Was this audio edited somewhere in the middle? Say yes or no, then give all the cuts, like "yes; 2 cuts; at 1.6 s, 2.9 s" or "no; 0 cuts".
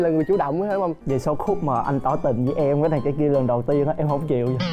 yes; 1 cut; at 1.0 s